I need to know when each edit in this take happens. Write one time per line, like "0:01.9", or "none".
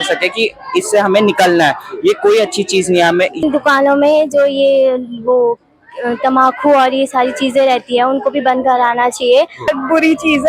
0:03.4
0:09.7